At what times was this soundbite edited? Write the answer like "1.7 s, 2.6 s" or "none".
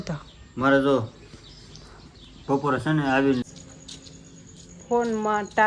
3.4 s